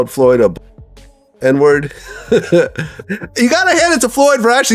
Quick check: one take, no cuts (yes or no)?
no